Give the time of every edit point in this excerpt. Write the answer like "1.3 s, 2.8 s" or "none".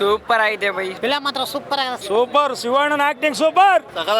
1.0 s, 2.0 s